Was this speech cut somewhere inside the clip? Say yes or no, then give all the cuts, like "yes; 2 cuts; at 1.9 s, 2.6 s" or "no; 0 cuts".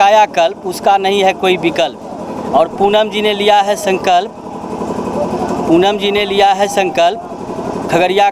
no; 0 cuts